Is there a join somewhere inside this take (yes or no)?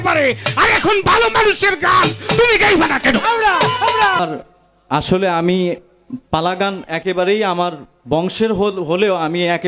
yes